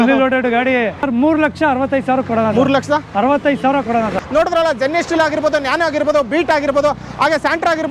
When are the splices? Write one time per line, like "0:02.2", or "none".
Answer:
0:01.1
0:04.2